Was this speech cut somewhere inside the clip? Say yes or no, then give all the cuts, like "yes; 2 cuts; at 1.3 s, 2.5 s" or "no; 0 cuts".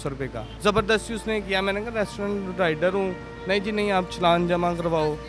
no; 0 cuts